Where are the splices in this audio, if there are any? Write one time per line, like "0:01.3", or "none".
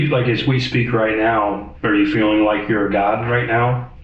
0:01.7